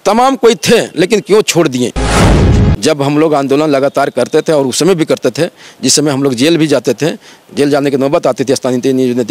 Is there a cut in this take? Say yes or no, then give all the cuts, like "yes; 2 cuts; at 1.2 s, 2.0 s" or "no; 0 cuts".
yes; 1 cut; at 2.3 s